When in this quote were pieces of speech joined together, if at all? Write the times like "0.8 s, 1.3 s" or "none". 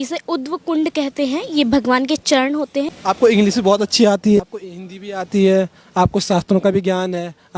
2.9 s, 4.4 s